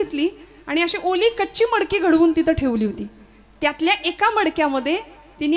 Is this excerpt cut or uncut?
uncut